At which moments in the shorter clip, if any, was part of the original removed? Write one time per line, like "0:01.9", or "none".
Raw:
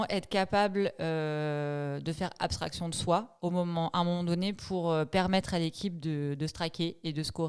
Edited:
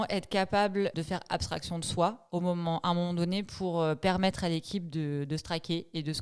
0:00.9